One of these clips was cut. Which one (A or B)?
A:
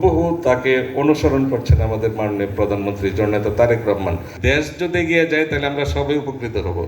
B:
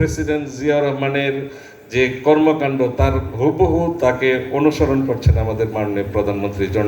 A